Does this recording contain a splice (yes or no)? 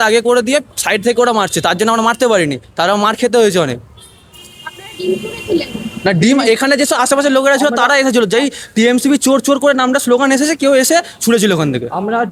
no